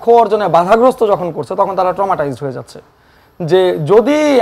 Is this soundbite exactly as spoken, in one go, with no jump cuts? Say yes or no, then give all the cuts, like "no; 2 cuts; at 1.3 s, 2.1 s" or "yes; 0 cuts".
no; 1 cut; at 3.2 s